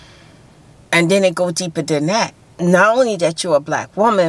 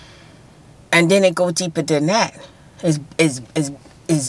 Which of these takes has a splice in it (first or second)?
first